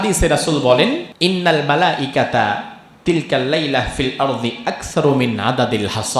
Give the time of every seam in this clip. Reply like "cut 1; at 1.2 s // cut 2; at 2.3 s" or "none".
cut 1; at 1.1 s